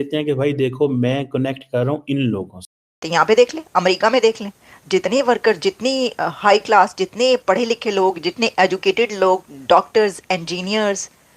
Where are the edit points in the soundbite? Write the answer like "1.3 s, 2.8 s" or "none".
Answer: 3.0 s